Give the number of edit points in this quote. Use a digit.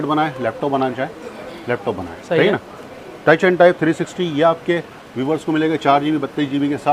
0